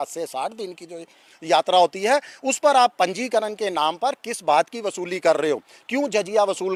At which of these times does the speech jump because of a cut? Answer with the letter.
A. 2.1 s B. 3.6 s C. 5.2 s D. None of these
D